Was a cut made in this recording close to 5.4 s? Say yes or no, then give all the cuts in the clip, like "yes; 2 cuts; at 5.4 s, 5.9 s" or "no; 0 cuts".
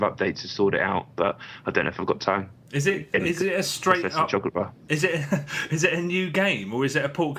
no; 1 cut; at 3.7 s